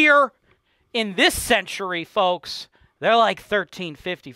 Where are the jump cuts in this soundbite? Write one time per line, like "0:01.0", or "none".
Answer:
none